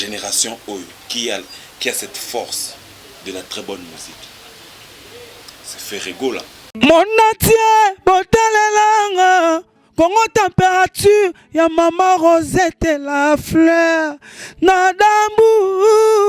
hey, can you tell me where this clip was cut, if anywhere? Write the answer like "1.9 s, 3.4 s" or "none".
6.6 s